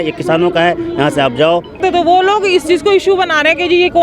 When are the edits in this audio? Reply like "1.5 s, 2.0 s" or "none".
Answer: 1.8 s